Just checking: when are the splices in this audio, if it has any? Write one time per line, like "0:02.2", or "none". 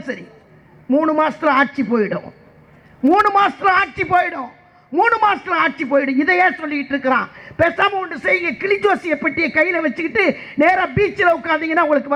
none